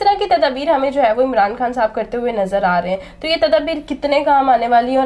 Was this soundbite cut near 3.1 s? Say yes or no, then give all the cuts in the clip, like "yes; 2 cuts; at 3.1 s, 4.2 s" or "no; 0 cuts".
no; 0 cuts